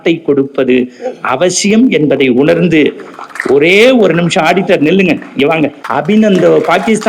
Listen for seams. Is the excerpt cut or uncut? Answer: cut